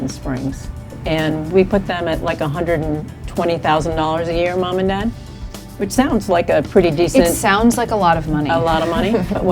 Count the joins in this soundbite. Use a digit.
1